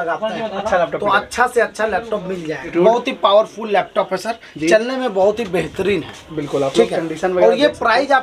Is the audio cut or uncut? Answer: cut